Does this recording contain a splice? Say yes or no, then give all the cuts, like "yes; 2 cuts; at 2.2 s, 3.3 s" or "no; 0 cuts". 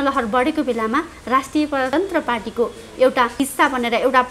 yes; 2 cuts; at 1.9 s, 3.3 s